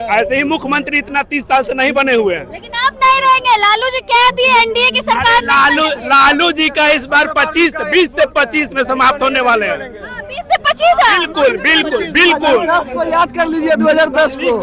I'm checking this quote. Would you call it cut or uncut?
uncut